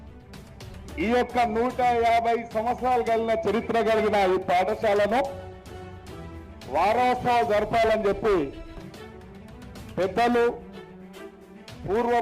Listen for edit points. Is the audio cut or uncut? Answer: cut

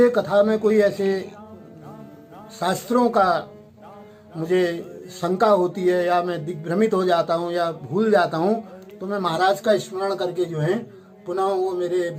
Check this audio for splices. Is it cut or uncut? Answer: uncut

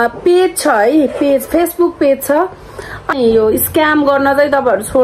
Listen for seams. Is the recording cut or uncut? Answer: cut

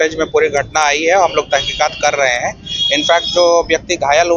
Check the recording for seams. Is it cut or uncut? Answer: uncut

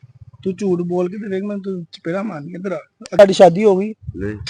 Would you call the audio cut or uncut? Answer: cut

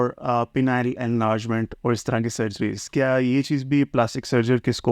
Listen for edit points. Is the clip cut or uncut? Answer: uncut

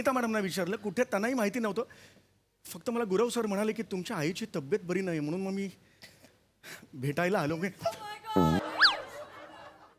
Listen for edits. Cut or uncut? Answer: cut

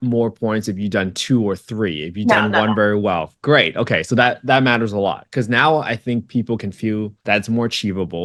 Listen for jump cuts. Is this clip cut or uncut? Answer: uncut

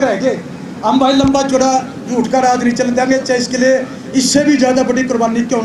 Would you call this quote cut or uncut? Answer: uncut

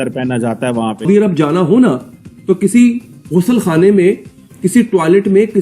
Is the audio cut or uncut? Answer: cut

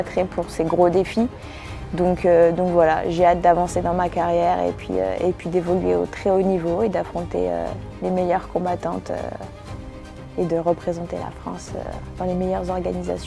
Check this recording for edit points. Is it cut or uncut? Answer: cut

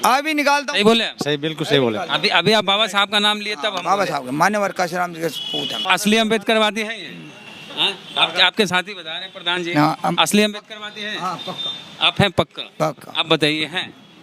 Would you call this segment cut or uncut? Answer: cut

